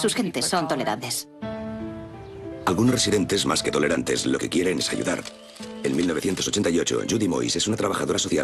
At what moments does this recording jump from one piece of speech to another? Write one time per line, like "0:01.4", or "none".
0:01.6